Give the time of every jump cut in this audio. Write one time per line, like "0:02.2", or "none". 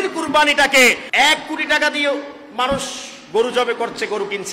0:01.0